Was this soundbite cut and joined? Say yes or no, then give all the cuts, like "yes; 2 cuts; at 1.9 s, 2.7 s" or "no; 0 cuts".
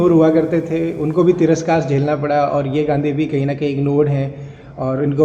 no; 0 cuts